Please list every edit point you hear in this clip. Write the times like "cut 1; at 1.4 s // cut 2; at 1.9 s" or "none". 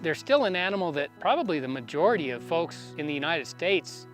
cut 1; at 1.1 s // cut 2; at 2.6 s